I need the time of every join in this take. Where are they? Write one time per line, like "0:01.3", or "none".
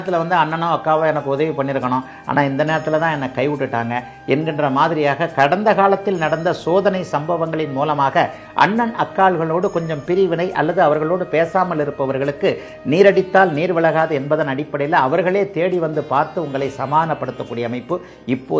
none